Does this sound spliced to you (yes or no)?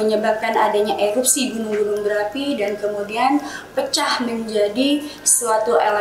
no